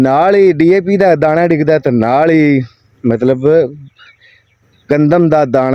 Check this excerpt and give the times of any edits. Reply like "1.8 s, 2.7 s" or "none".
none